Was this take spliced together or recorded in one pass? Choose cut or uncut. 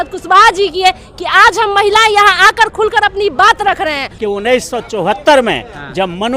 cut